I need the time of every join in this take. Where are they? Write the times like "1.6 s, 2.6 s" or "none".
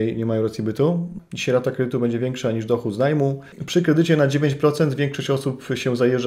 1.2 s, 3.6 s